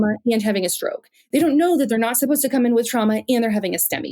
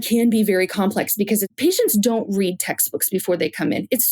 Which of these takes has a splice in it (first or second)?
second